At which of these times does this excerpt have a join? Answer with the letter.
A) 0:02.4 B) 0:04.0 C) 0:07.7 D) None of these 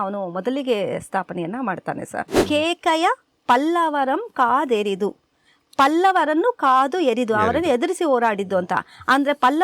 A